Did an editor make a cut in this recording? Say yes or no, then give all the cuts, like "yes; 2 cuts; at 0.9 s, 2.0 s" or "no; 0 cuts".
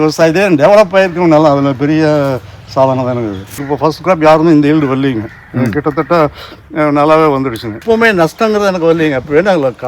yes; 2 cuts; at 3.7 s, 7.8 s